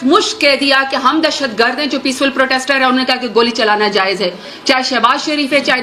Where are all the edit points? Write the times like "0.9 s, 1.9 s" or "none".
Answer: 4.5 s